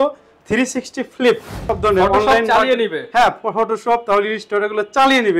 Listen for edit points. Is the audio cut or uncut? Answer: cut